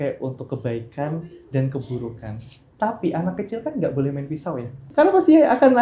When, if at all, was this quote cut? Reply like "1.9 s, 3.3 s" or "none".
4.8 s